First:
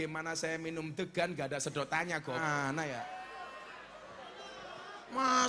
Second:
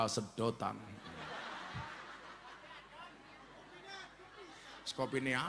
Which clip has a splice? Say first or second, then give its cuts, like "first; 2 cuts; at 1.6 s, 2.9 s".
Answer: first; 1 cut; at 2.4 s